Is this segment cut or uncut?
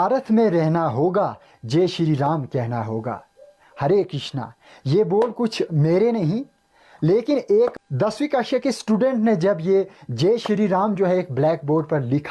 cut